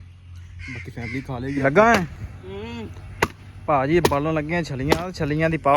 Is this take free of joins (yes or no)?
no